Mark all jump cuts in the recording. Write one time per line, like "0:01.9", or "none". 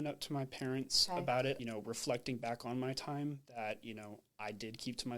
0:01.6